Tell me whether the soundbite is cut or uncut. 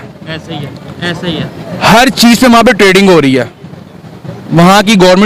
uncut